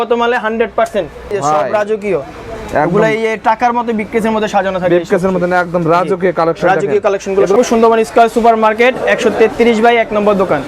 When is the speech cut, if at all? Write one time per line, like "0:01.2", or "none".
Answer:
0:01.3
0:07.5